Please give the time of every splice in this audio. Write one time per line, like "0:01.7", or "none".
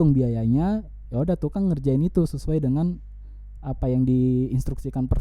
none